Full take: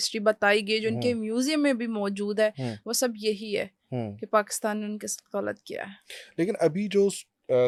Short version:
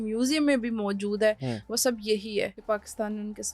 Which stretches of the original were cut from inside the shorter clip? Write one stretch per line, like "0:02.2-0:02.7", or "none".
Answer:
0:03.7-0:04.2